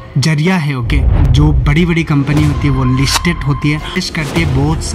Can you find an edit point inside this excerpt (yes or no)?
yes